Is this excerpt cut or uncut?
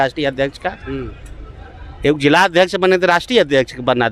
uncut